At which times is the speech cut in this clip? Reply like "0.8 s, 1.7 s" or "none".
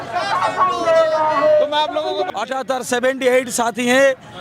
2.2 s